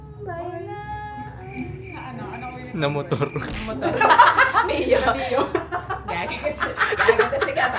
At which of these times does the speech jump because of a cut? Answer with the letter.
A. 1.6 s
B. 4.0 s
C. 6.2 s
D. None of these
D